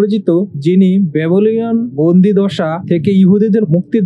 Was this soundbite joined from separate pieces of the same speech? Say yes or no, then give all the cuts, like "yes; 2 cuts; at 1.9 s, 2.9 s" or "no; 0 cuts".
no; 0 cuts